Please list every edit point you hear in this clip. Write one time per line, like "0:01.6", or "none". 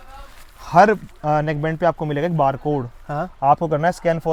none